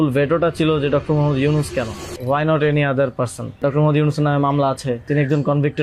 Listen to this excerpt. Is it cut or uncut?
cut